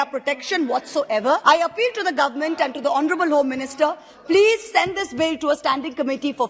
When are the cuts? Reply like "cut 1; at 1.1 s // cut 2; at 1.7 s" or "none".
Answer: cut 1; at 1.4 s